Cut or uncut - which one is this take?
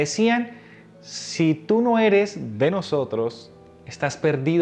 uncut